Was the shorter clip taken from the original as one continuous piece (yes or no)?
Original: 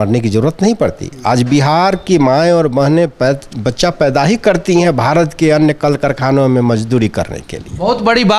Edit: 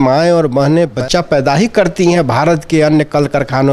no